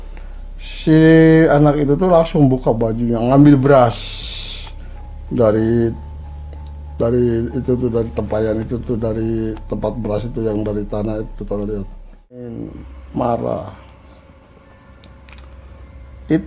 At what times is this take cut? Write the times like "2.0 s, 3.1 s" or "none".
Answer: 12.6 s